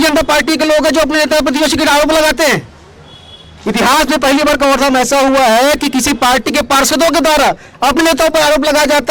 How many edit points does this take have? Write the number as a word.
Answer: zero